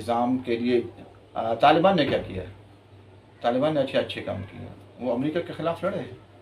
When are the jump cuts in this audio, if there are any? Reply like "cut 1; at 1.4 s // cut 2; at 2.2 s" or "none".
none

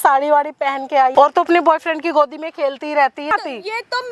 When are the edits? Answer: cut 1; at 1.1 s // cut 2; at 3.3 s

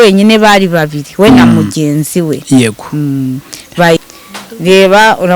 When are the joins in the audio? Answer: cut 1; at 4.0 s

